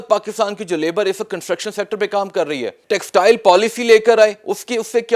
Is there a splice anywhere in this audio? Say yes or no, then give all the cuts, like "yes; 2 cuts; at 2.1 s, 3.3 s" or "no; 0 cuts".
yes; 1 cut; at 2.8 s